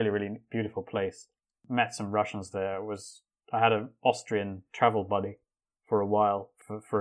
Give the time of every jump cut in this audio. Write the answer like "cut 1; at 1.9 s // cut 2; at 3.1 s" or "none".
cut 1; at 1.6 s